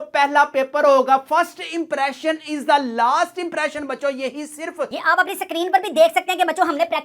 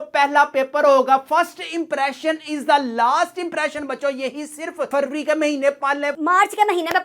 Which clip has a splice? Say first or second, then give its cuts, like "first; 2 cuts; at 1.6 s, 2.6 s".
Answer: first; 1 cut; at 4.9 s